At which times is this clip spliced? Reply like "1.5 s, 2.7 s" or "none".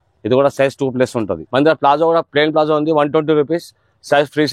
1.4 s